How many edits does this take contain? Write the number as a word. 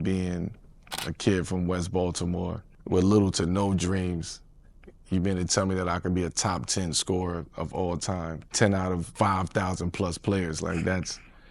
one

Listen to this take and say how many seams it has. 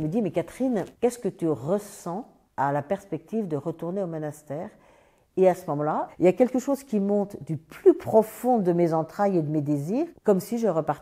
one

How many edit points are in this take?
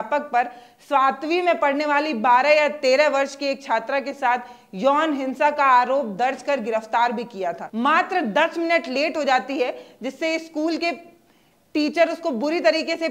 one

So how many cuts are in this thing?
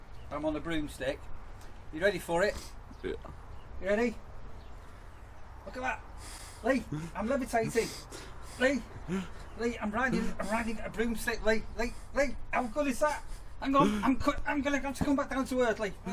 zero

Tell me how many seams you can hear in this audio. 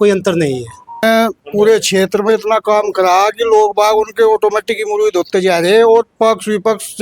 one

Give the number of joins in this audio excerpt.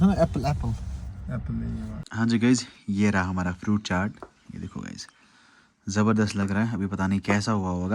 one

